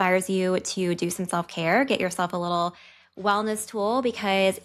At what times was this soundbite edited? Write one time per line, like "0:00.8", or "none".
none

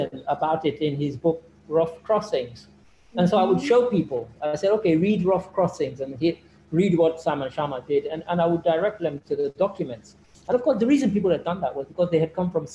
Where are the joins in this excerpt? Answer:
none

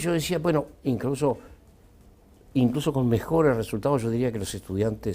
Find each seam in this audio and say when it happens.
0:03.9

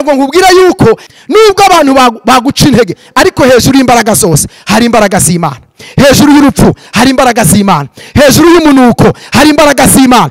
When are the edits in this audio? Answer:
0:01.1

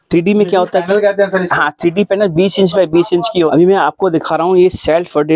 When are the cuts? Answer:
0:03.5

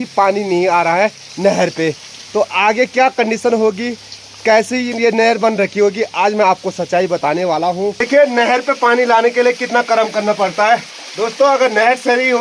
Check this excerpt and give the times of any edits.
0:08.0

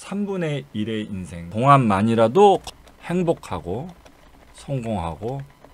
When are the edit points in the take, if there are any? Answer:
0:01.5
0:02.7

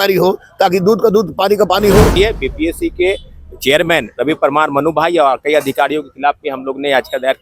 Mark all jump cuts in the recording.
0:02.2

